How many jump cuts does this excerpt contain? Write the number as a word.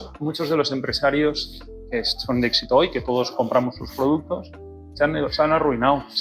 zero